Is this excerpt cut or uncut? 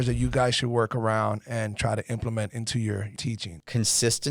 cut